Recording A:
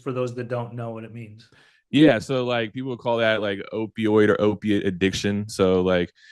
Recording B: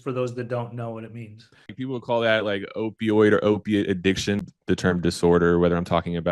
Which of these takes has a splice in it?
B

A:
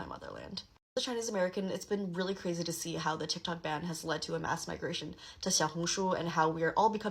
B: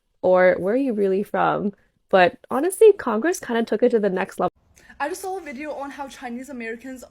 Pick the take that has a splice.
B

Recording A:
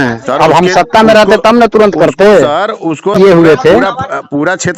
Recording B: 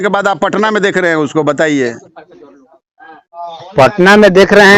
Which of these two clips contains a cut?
A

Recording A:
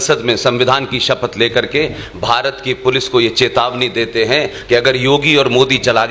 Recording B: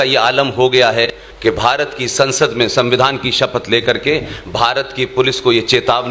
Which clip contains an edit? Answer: B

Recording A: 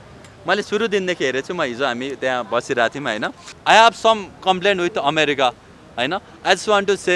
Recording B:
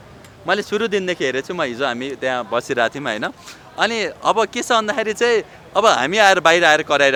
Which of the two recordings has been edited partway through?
A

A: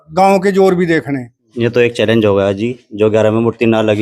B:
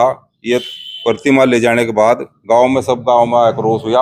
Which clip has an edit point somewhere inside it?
A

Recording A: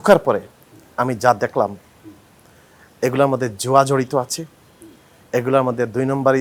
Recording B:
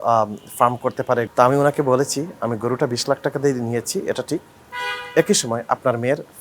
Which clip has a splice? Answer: B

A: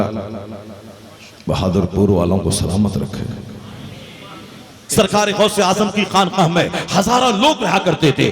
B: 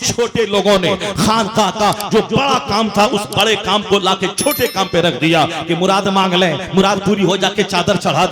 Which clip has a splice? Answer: A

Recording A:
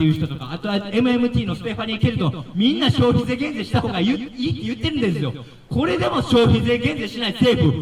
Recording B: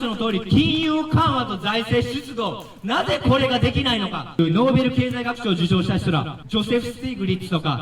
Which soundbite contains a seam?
B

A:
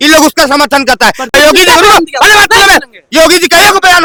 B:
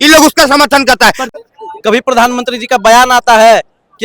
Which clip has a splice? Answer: B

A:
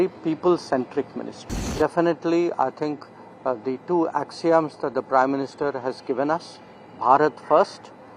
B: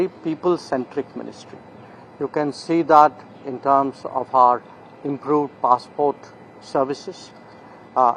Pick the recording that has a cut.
A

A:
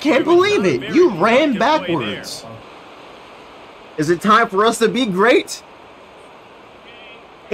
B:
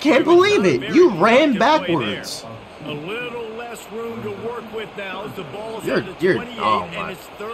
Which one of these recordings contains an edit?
A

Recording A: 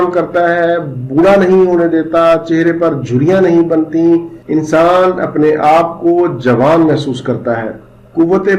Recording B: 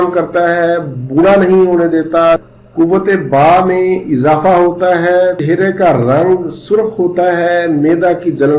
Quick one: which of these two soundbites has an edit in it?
B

